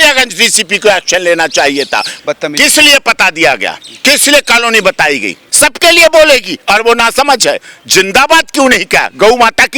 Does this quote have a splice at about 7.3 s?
no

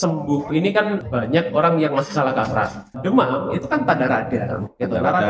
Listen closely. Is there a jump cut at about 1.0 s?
yes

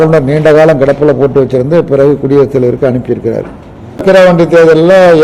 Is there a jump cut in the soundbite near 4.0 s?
yes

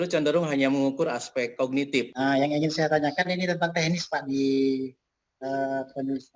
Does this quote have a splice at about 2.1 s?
yes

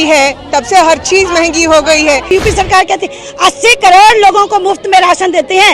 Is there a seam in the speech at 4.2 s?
no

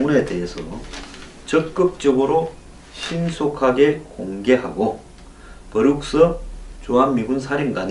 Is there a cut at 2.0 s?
yes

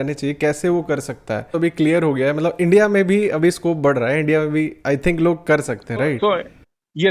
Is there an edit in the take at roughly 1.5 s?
yes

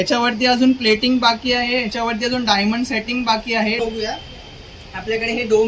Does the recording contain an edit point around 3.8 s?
yes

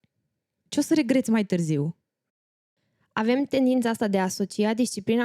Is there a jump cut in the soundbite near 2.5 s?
yes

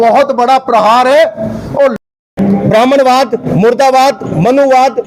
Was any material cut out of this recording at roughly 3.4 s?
no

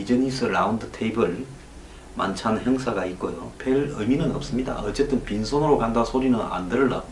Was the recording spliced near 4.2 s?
yes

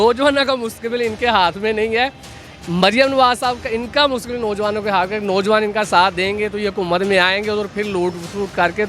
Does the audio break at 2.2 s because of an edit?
no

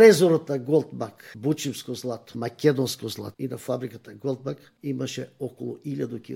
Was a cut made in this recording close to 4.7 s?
yes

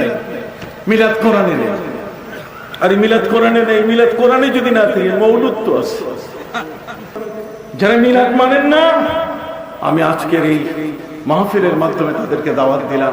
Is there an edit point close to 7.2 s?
yes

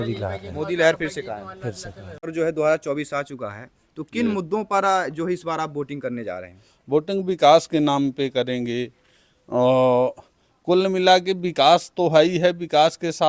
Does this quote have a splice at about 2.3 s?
yes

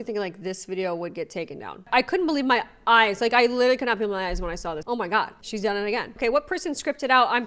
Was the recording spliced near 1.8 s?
yes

